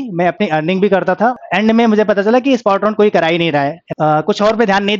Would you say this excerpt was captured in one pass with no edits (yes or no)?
no